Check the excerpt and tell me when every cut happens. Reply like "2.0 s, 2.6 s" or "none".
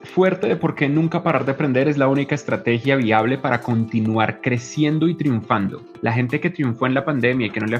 5.9 s